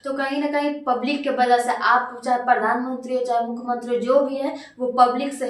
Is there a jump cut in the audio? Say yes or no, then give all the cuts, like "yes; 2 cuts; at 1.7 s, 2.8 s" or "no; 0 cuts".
no; 0 cuts